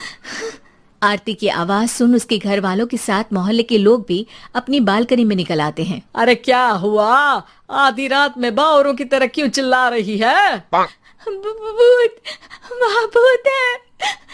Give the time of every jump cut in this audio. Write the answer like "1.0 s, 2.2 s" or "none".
none